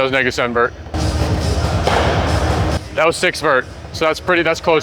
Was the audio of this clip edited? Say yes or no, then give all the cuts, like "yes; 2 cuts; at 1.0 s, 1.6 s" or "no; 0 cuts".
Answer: yes; 2 cuts; at 0.9 s, 2.8 s